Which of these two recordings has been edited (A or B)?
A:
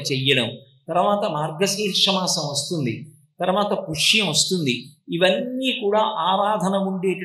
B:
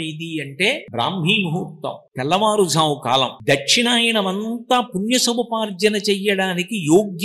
B